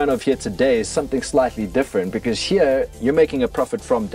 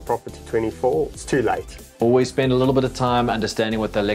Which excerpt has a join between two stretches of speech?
second; 1 cut; at 1.6 s

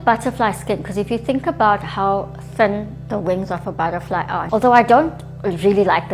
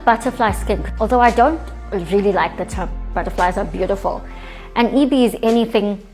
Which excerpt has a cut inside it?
second; 2 cuts; at 0.9 s, 2.9 s

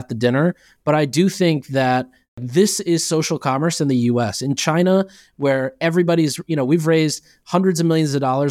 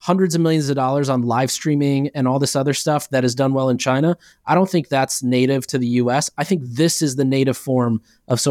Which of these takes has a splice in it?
first; 1 cut; at 2.4 s

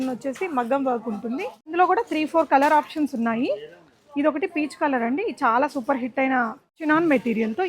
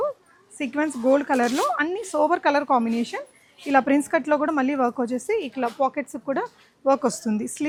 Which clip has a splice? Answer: first; 2 cuts; at 1.7 s, 6.8 s

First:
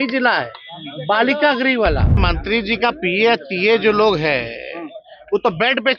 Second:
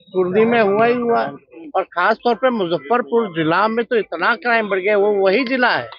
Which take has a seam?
first; 1 cut; at 2.3 s

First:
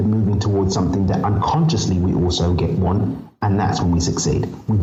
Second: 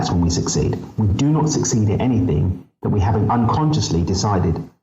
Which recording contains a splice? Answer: second; 1 cut; at 3.3 s

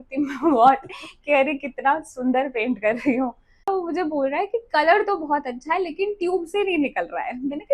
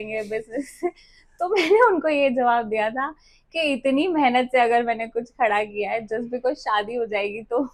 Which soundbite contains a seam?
first; 1 cut; at 3.7 s

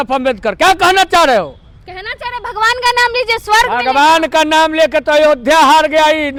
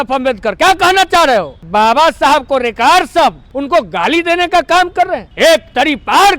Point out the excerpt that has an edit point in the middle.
second; 3 cuts; at 1.6 s, 3.5 s, 5.3 s

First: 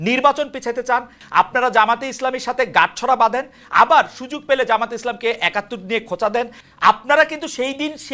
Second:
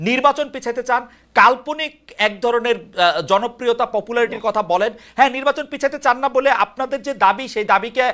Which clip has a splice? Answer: first; 2 cuts; at 1.2 s, 6.6 s

